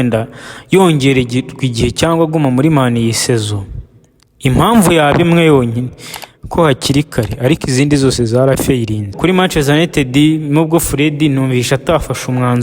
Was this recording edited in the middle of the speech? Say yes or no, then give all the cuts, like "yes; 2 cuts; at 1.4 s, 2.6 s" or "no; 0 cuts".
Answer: yes; 1 cut; at 9.2 s